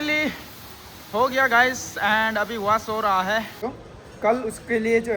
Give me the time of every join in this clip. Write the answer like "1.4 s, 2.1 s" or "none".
3.6 s